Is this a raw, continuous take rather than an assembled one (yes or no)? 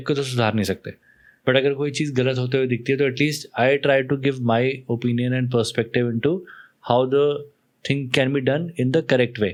yes